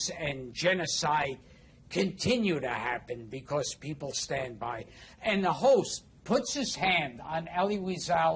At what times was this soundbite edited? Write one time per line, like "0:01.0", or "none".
none